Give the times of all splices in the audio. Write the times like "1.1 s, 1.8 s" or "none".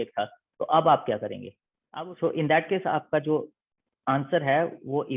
1.8 s